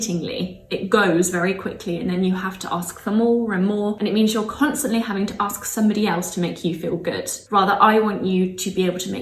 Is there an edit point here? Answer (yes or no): yes